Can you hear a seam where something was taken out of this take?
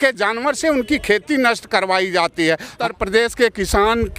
yes; 1 cut; at 2.8 s

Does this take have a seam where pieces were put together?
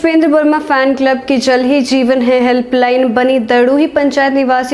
no; 0 cuts

